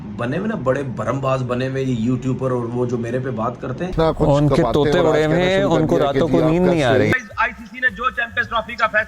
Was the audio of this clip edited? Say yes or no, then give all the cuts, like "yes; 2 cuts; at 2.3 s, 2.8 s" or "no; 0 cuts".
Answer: yes; 2 cuts; at 3.9 s, 7.1 s